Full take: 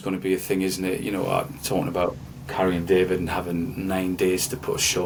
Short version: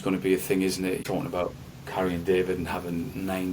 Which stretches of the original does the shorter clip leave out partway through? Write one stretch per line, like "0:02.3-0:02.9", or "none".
0:01.0-0:01.6